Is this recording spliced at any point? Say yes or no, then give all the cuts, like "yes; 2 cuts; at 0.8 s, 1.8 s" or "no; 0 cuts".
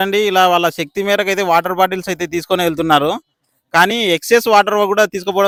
no; 0 cuts